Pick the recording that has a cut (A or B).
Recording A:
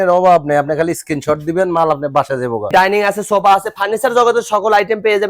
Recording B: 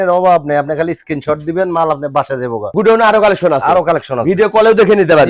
A